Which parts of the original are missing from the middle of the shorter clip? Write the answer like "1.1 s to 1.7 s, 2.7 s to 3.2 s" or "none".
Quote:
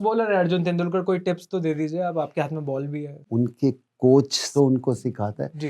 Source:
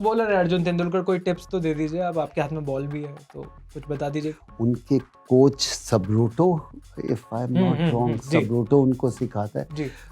3.2 s to 4.5 s, 5.8 s to 8.7 s